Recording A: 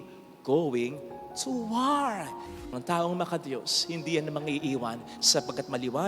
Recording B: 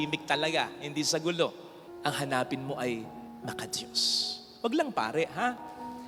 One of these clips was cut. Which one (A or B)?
A